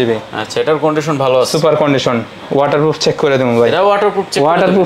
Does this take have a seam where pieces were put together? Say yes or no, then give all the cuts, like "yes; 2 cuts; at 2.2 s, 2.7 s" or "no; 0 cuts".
no; 0 cuts